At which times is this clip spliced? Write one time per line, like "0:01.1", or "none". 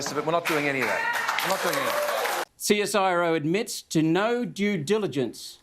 0:02.5